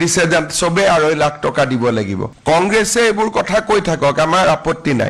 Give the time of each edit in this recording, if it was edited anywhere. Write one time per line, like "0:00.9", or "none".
0:02.3